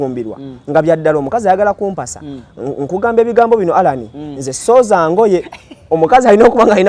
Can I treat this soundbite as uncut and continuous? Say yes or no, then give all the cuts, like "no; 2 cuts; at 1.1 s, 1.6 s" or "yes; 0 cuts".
yes; 0 cuts